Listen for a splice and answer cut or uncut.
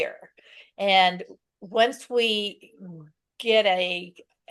uncut